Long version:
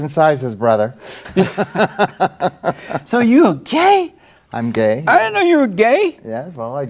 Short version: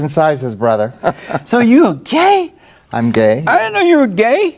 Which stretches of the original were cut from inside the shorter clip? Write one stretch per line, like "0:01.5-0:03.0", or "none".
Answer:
0:01.0-0:02.6